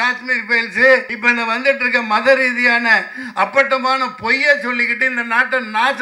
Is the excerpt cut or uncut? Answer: cut